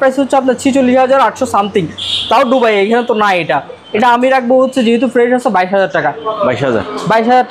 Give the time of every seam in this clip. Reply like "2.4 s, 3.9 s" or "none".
none